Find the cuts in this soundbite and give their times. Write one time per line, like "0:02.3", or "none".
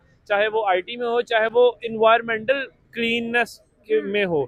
none